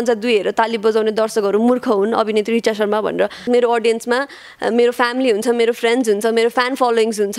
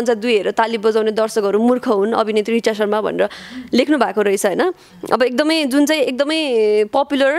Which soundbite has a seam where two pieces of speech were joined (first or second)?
first